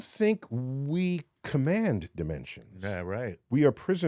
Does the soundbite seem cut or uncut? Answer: cut